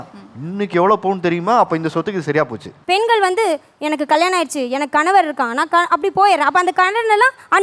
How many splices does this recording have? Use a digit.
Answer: 1